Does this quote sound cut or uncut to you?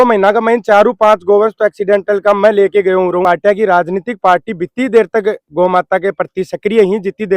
cut